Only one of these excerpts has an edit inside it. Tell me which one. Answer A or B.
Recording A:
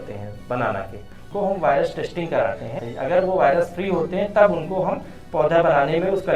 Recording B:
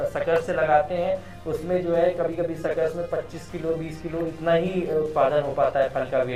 A